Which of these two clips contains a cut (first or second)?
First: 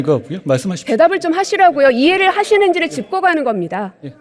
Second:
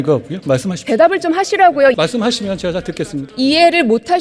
second